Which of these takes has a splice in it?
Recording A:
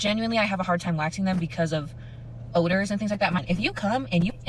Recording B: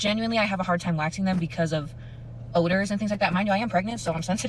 A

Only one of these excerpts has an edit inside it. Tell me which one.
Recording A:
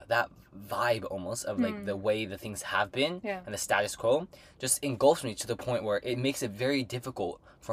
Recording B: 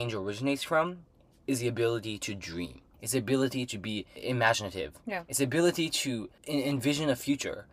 B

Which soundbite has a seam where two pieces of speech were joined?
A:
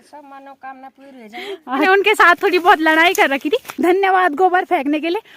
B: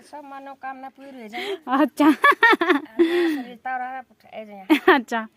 A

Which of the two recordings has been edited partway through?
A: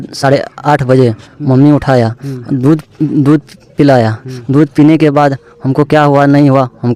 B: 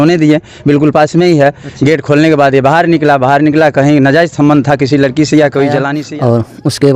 B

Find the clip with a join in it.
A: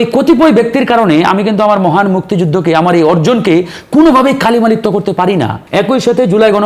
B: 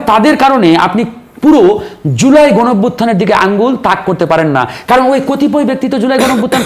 A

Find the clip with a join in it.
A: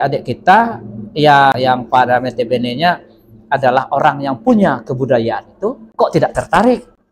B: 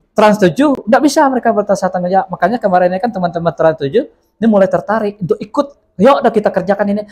A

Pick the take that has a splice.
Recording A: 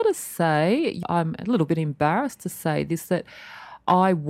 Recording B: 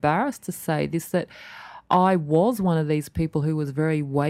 A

